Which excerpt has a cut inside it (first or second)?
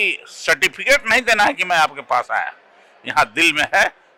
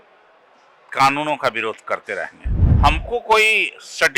second